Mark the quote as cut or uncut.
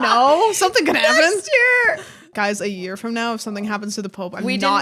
cut